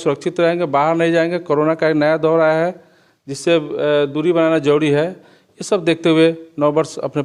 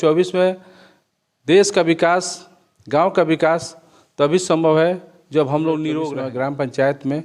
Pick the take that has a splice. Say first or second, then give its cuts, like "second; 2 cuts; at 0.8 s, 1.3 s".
second; 1 cut; at 6.1 s